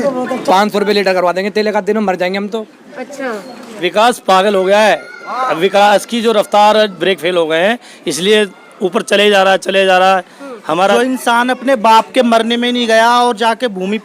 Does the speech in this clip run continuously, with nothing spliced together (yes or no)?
no